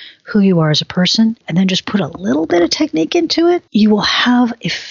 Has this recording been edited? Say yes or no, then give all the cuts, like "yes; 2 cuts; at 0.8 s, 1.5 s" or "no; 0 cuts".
yes; 2 cuts; at 1.4 s, 3.6 s